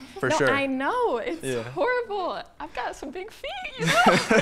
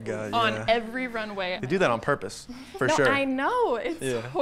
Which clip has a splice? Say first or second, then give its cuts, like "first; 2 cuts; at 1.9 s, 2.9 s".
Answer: second; 1 cut; at 1.6 s